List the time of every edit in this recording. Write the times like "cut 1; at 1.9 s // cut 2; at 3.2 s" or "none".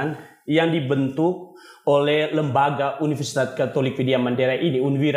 none